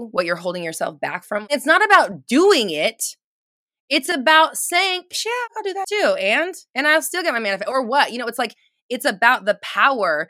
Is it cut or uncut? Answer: cut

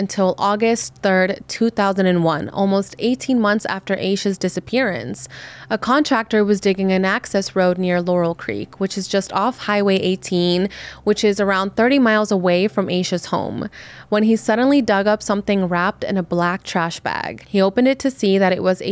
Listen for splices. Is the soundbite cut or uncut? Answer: uncut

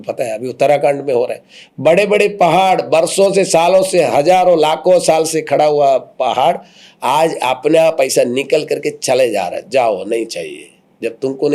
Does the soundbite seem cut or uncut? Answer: uncut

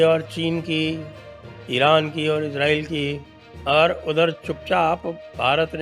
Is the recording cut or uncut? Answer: uncut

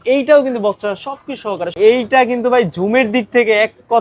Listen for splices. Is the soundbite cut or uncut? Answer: cut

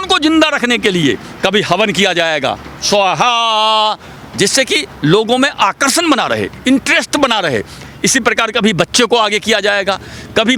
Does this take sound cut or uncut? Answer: uncut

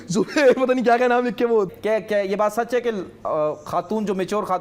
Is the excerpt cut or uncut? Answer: cut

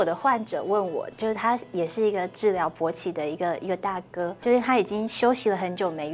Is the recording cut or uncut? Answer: cut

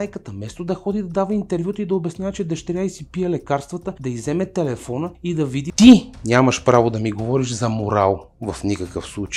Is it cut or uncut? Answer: cut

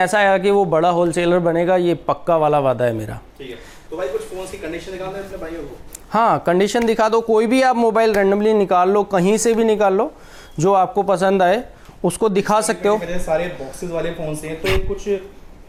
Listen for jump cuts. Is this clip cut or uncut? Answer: uncut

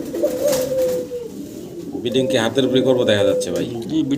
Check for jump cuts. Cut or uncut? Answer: uncut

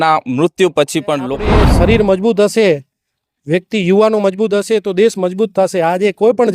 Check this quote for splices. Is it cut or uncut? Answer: cut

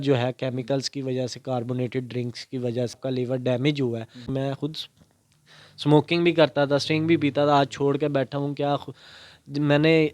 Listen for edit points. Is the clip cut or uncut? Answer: cut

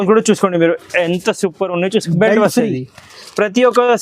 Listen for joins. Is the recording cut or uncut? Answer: cut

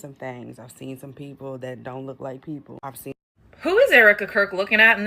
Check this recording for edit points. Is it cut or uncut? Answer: cut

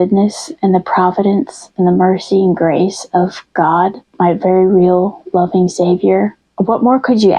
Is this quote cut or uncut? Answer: cut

